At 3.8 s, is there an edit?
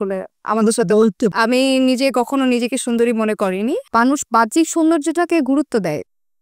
yes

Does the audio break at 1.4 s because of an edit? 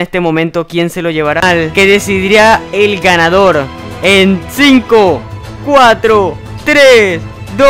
yes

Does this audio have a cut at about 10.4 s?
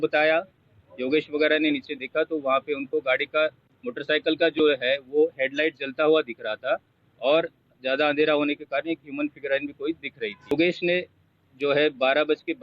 yes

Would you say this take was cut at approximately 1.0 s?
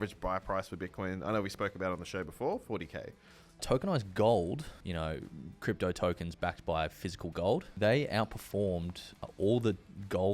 no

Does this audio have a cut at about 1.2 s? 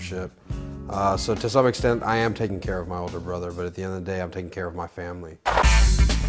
yes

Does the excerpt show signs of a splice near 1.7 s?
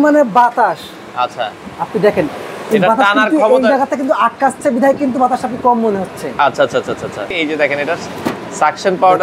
no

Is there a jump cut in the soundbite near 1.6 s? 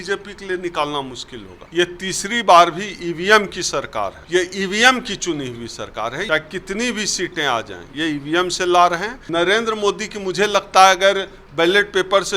yes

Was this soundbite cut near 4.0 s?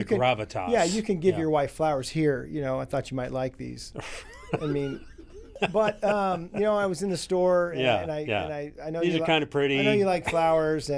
no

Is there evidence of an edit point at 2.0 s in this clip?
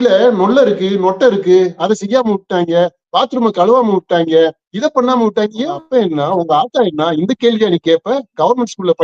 no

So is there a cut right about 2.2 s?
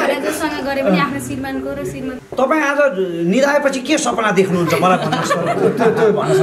yes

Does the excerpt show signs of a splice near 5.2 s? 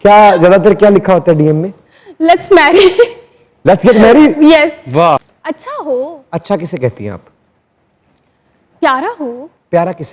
yes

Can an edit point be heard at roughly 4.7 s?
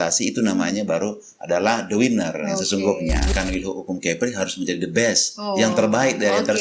no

